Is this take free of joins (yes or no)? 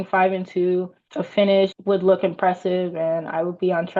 no